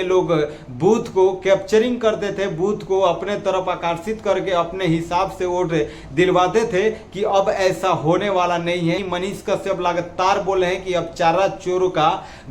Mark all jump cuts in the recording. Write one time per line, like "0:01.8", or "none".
0:09.0